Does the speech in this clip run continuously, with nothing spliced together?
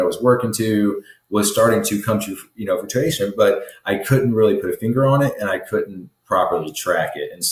yes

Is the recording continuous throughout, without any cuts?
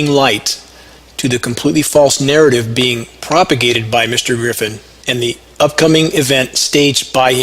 no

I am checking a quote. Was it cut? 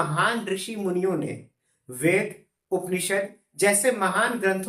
no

